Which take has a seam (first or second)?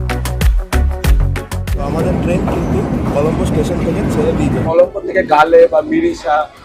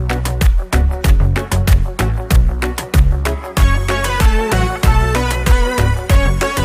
first